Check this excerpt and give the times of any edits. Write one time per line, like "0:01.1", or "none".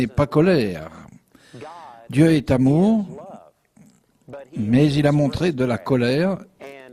0:02.1

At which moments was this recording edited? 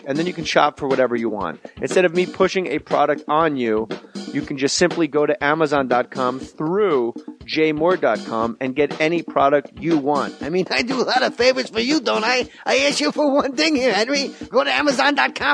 0:02.2

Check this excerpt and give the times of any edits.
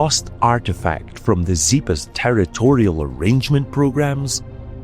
none

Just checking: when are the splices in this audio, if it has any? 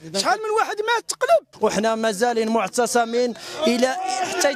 0:01.5

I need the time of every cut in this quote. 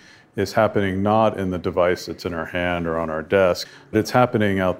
0:03.6

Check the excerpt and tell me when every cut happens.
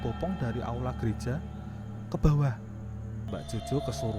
0:03.0

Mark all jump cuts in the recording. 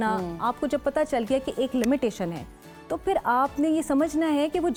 none

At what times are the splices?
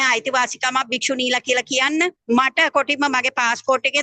0:02.2

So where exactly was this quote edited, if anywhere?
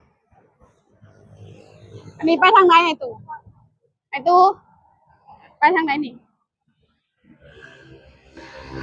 none

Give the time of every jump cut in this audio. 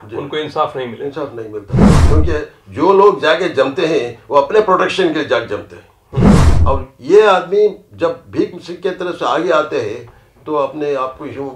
0:06.4

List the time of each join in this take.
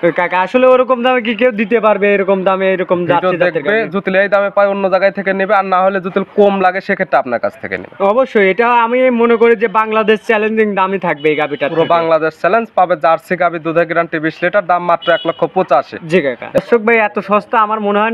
0:16.6

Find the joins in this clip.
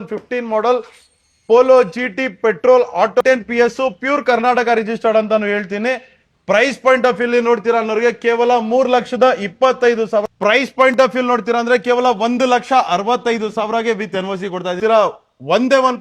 0:03.2
0:10.2
0:14.8

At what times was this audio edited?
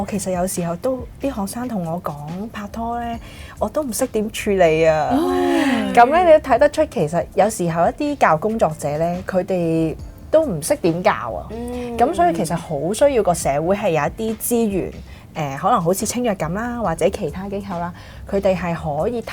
none

